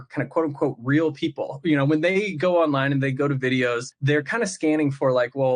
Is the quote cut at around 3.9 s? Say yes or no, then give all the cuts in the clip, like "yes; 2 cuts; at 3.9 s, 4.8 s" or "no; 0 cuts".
yes; 1 cut; at 3.9 s